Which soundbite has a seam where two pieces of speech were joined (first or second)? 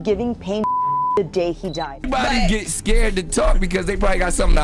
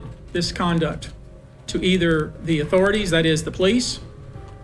first